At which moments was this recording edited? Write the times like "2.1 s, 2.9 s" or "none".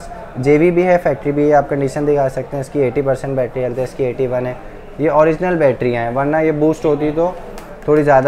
none